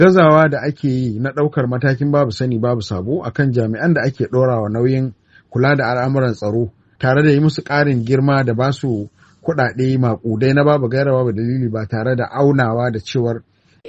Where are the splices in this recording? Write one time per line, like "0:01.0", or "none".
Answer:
none